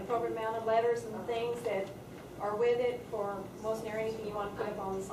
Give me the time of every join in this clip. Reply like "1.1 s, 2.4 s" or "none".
1.9 s